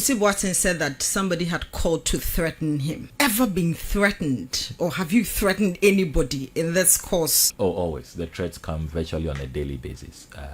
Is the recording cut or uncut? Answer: cut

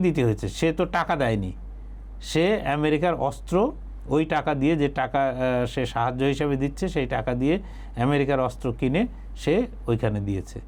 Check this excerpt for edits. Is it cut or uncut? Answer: uncut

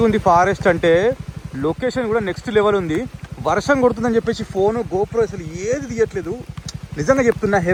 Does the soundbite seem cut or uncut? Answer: uncut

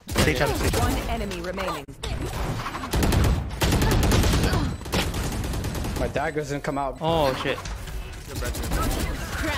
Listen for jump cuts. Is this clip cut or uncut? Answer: cut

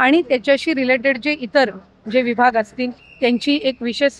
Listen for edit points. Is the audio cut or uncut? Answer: uncut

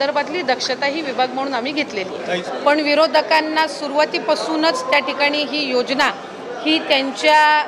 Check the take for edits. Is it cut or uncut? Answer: cut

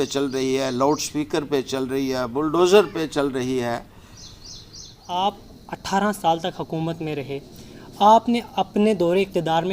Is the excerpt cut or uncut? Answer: cut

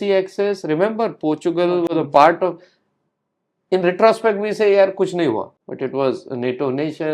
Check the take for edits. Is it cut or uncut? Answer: uncut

